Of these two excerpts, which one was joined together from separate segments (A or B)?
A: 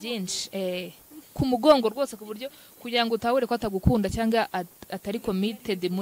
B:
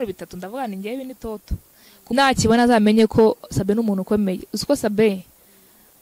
B